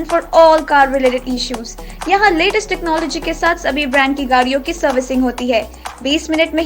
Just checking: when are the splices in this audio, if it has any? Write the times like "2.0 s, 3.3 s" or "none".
none